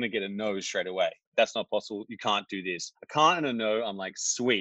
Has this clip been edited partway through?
yes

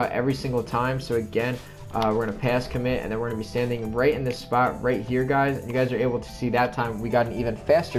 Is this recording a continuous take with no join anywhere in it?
no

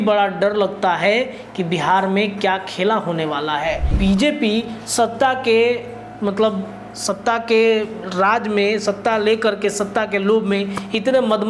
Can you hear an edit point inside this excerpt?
yes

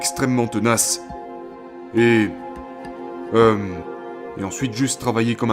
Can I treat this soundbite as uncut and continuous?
yes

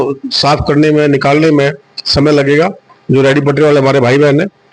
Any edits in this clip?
yes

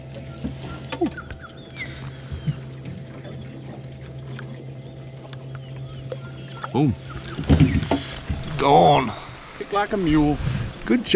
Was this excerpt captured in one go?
yes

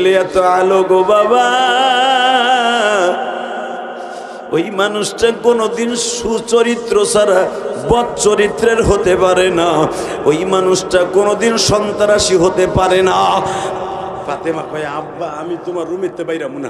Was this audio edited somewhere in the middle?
yes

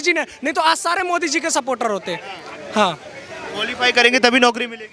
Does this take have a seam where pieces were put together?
no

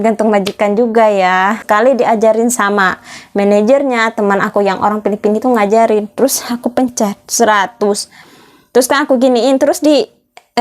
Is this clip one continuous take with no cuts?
no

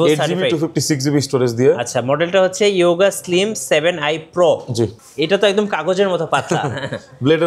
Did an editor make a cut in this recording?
yes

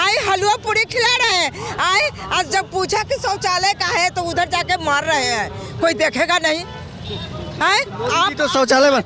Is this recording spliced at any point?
no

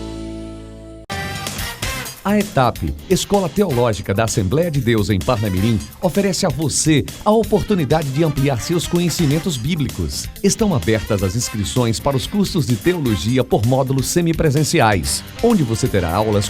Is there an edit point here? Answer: yes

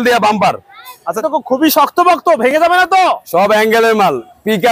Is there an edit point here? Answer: yes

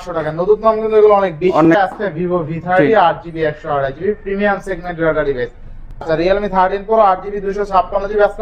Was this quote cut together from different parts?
yes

